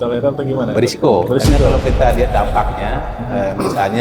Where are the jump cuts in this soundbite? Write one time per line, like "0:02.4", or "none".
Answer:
none